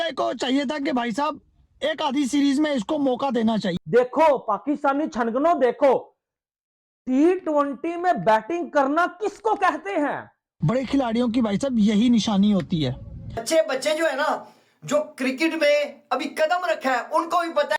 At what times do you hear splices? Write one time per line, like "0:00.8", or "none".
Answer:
0:03.8
0:10.6
0:13.4